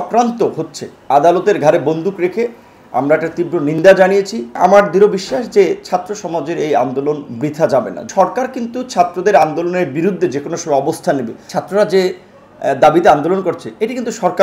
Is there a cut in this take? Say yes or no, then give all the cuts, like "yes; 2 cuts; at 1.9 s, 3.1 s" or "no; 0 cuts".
yes; 3 cuts; at 4.5 s, 8.1 s, 11.5 s